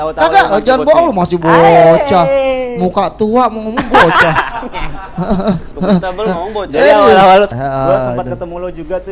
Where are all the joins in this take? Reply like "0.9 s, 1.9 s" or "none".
7.5 s